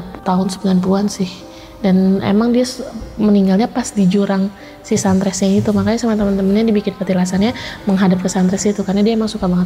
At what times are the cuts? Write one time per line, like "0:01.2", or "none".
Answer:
none